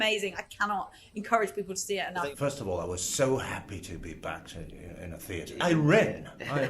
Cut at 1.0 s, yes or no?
no